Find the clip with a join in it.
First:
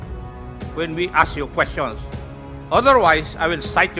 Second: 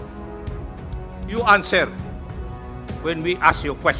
second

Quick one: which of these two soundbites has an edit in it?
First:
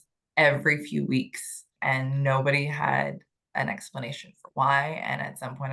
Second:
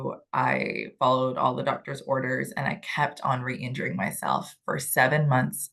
first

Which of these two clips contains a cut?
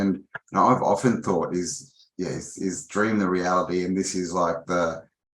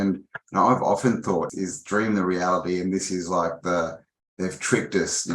second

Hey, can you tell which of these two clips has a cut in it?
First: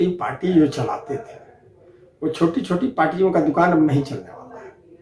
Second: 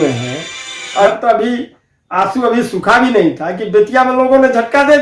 second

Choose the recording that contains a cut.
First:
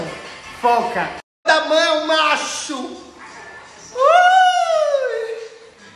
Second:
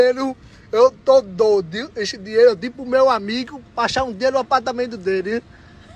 first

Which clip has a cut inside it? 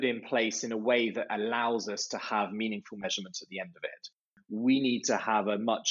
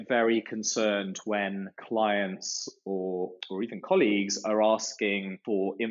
first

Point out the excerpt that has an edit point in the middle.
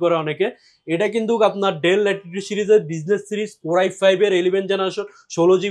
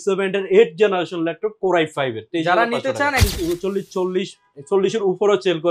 second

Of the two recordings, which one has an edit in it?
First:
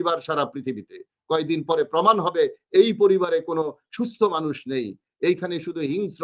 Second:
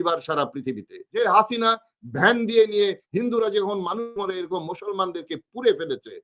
second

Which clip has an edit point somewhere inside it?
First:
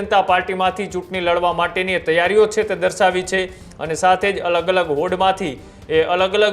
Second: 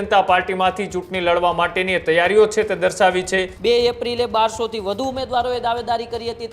second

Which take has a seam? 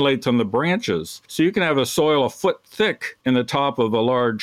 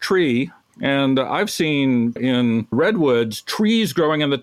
first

